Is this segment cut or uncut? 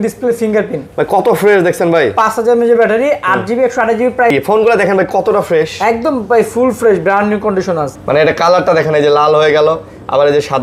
cut